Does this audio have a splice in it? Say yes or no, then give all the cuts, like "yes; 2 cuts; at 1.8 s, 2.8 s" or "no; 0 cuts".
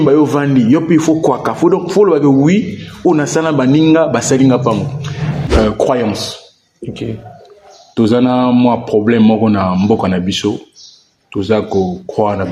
yes; 1 cut; at 5.2 s